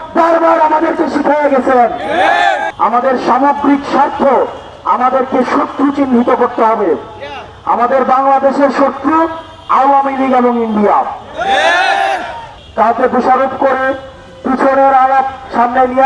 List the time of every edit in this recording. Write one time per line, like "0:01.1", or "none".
0:02.6
0:12.5